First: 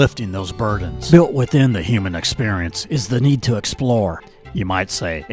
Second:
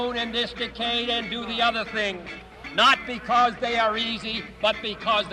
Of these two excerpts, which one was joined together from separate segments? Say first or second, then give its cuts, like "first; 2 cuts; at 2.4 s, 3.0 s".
first; 1 cut; at 0.9 s